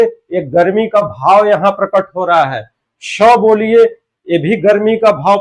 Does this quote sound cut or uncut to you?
uncut